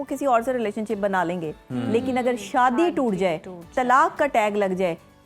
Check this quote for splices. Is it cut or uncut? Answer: uncut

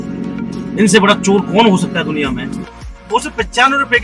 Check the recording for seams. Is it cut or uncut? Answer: cut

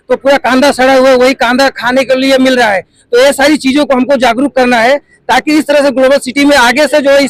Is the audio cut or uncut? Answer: uncut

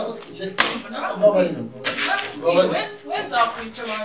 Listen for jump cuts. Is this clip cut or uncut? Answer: uncut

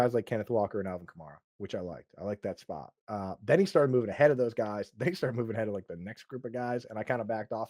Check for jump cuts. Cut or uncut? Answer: uncut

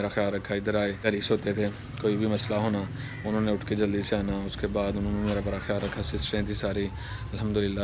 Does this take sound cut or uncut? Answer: cut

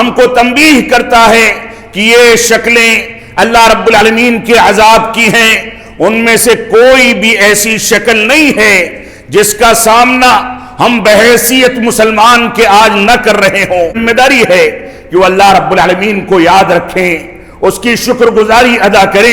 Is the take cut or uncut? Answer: cut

